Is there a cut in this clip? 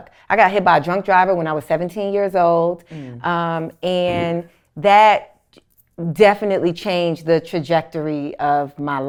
no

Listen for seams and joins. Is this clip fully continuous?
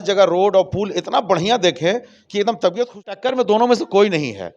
no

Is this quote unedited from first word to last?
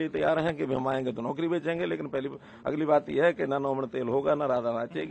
yes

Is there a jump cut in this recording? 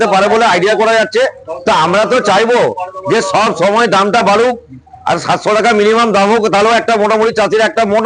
no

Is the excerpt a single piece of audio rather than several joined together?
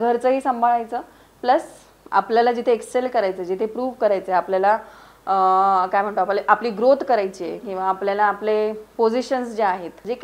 yes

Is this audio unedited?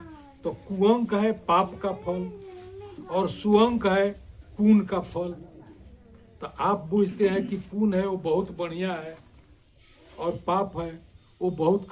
yes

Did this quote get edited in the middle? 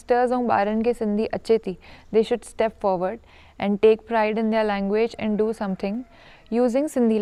no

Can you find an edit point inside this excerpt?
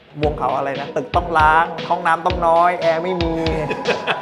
yes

